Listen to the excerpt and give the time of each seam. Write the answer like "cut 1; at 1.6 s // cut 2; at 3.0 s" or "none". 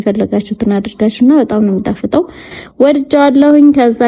none